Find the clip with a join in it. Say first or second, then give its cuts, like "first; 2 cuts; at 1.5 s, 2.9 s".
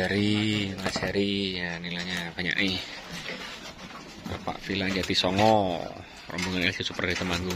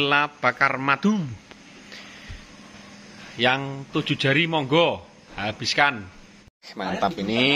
second; 1 cut; at 6.7 s